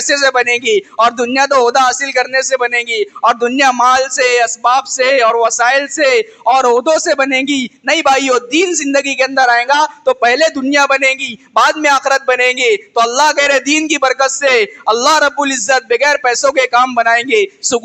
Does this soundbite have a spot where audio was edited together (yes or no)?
no